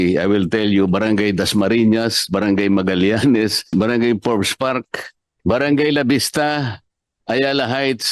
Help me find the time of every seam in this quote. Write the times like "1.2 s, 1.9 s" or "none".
3.7 s, 5.4 s